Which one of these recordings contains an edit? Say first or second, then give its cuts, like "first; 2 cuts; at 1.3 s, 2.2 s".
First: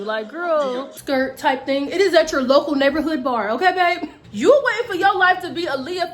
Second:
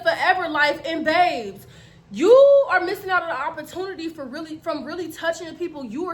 first; 2 cuts; at 0.9 s, 4.2 s